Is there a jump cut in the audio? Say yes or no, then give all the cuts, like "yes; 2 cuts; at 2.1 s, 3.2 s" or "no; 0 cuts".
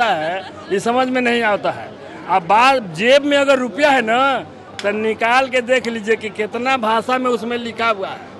no; 0 cuts